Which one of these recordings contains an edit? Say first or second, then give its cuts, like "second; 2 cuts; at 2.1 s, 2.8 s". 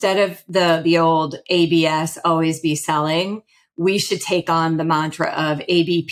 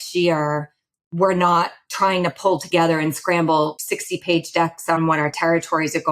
second; 2 cuts; at 3.8 s, 5.0 s